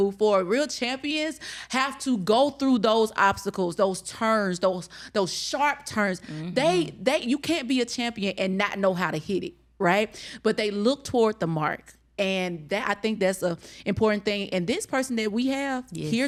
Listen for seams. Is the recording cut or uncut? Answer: uncut